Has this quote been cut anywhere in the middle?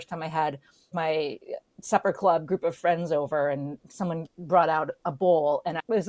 yes; 2 cuts; at 0.9 s, 4.3 s

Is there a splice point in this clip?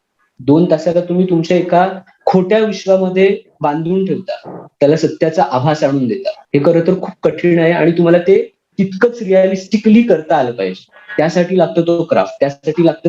yes; 1 cut; at 6.4 s

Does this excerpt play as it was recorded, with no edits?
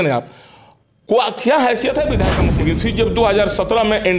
no; 1 cut; at 2.4 s

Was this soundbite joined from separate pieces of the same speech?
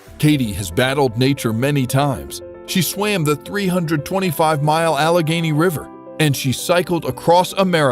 yes; 1 cut; at 6.4 s

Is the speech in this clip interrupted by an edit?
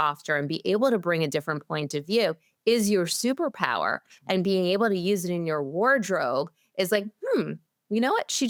no; 0 cuts

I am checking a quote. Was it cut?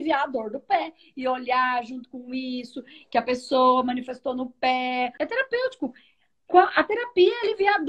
yes; 1 cut; at 5.1 s

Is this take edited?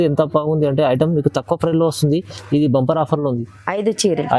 no; 0 cuts

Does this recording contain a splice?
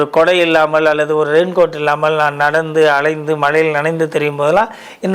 no; 0 cuts

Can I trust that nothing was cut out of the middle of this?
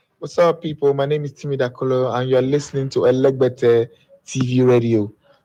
yes; 0 cuts

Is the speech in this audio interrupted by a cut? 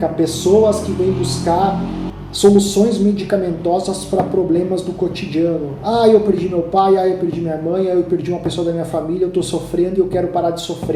no; 0 cuts

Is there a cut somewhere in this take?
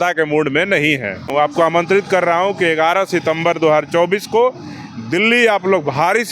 yes; 1 cut; at 1.3 s

